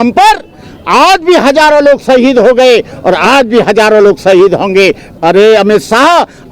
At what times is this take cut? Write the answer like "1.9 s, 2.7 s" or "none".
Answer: 5.0 s